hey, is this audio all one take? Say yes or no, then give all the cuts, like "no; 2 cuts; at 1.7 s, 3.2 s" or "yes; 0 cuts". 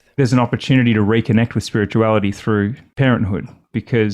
no; 1 cut; at 2.8 s